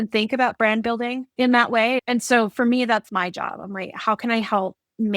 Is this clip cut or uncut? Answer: cut